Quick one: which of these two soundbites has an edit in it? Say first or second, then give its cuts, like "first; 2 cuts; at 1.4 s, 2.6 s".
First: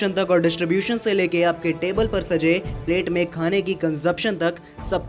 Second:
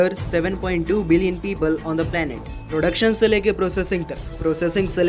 second; 1 cut; at 2.5 s